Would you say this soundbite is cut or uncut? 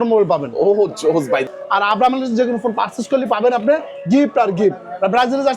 cut